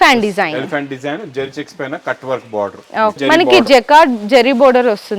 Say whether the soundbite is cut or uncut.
cut